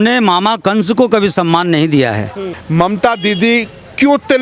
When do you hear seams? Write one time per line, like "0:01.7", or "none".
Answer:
0:02.5